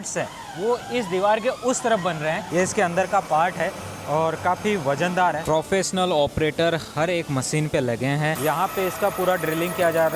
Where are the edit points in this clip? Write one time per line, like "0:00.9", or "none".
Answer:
0:02.4
0:05.4
0:08.4